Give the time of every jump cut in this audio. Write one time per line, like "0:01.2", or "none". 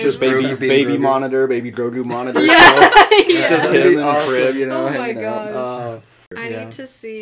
0:06.2